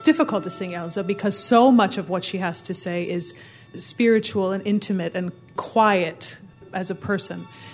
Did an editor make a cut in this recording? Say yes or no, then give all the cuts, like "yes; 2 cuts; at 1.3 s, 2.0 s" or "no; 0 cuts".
yes; 3 cuts; at 3.6 s, 5.5 s, 6.7 s